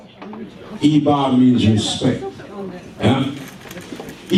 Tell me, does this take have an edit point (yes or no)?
no